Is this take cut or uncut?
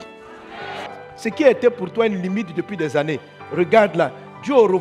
cut